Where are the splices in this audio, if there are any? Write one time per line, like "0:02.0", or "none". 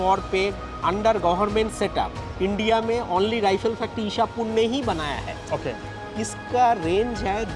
none

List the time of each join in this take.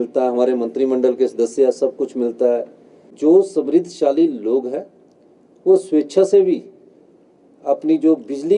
0:03.1

